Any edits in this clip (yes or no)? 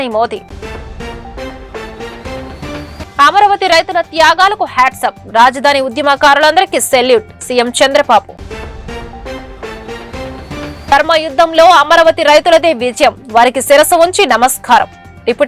no